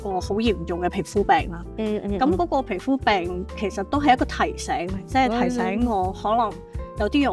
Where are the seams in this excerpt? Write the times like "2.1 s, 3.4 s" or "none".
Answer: none

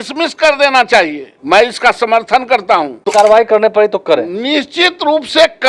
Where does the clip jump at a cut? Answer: 1.3 s, 3.0 s

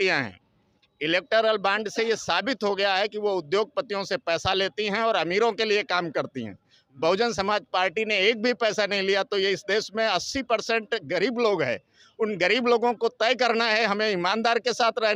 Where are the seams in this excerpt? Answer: none

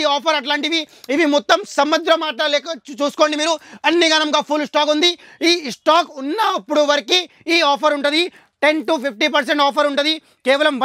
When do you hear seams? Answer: none

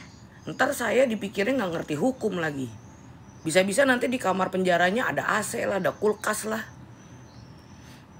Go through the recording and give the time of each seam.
none

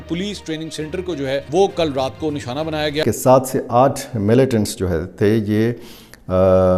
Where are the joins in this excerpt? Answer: 1.5 s, 3.0 s

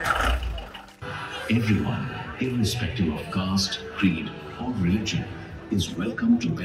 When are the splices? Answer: 1.0 s

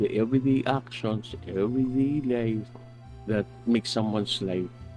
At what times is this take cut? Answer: none

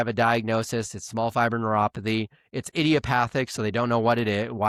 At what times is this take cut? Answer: none

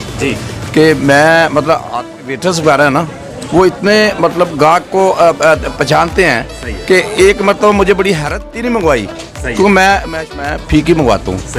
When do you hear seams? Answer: 2.1 s, 8.4 s, 10.4 s

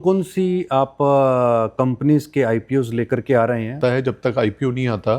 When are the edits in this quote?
3.8 s

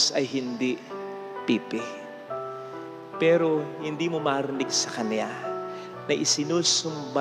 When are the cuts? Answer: none

